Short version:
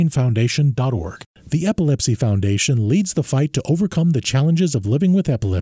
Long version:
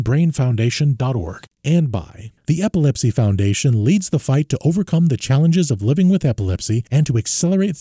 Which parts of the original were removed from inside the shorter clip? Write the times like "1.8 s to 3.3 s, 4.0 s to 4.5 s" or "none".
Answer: 1.5 s to 2.2 s